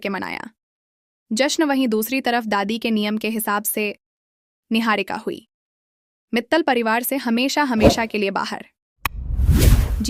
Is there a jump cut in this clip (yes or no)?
no